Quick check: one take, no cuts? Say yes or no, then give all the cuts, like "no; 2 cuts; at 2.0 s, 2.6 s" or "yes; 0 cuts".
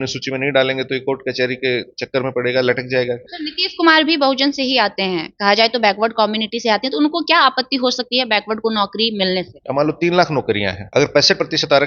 no; 3 cuts; at 3.2 s, 9.6 s, 10.8 s